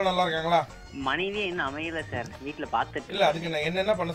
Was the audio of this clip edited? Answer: no; 0 cuts

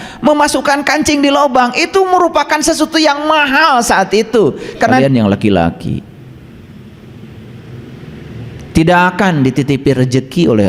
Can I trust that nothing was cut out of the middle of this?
no; 1 cut; at 5.0 s

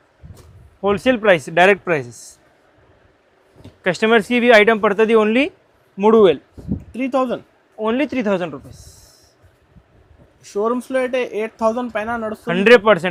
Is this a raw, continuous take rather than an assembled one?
yes; 0 cuts

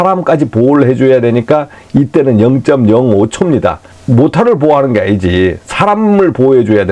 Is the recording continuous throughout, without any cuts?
no; 1 cut; at 3.9 s

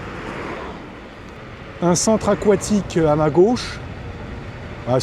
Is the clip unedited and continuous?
no; 1 cut; at 1.4 s

